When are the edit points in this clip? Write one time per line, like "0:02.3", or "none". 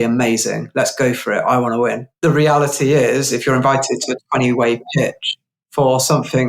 0:02.1